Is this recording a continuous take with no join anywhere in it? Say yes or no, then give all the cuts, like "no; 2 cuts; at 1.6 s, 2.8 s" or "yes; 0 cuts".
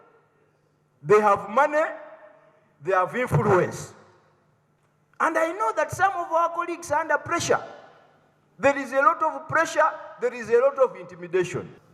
yes; 0 cuts